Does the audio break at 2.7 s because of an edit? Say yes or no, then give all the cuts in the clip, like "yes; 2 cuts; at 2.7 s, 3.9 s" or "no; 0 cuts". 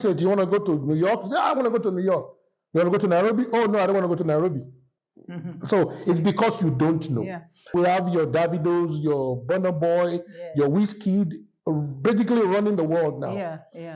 no; 1 cut; at 7.7 s